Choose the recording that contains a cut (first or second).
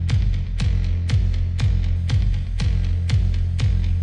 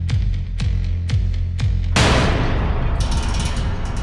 second